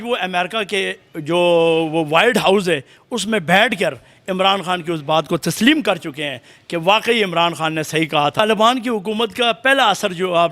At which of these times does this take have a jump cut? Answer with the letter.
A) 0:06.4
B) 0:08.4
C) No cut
B